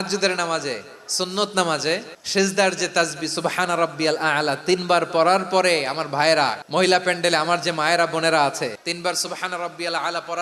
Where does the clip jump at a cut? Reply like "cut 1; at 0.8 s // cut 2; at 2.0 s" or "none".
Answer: cut 1; at 2.2 s // cut 2; at 6.6 s

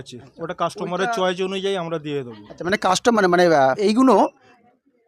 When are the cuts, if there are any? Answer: cut 1; at 3.8 s

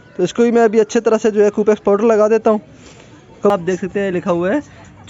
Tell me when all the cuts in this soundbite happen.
cut 1; at 3.5 s

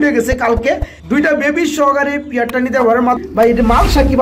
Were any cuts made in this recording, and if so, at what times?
cut 1; at 0.9 s // cut 2; at 3.2 s

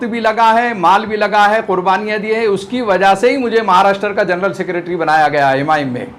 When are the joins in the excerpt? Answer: none

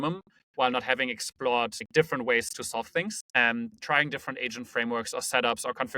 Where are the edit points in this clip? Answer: cut 1; at 1.8 s // cut 2; at 3.6 s

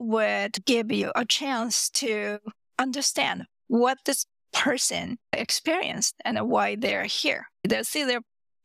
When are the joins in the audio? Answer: cut 1; at 7.5 s

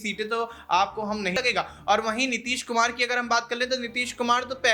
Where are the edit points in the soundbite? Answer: cut 1; at 1.3 s

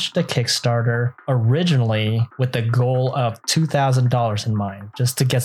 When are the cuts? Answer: cut 1; at 1.1 s // cut 2; at 2.3 s

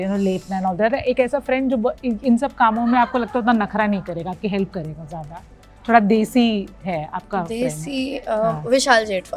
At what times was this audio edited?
none

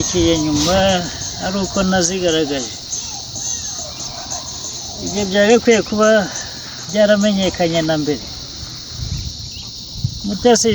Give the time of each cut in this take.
none

